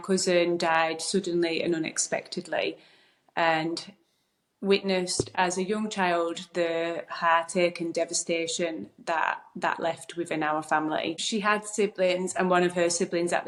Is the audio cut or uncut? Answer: uncut